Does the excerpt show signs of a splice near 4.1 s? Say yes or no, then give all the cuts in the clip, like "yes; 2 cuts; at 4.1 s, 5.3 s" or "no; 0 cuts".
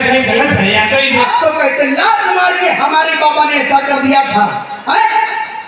no; 1 cut; at 1.2 s